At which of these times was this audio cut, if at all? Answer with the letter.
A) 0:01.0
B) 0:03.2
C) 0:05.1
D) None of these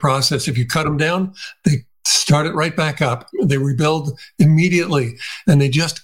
B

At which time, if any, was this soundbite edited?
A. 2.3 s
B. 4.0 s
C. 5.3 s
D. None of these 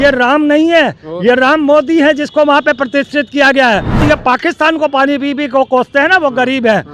B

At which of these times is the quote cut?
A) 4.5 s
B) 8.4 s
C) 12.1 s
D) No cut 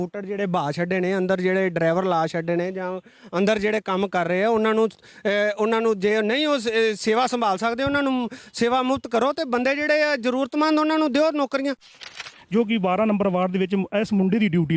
C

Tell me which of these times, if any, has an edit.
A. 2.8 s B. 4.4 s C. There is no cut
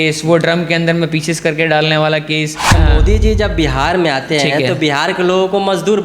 A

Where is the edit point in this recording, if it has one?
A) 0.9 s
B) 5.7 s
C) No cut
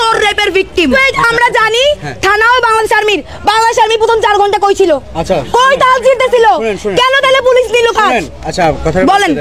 A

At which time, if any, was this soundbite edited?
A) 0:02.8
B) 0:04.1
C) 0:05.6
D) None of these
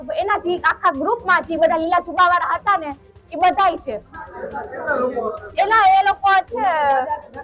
D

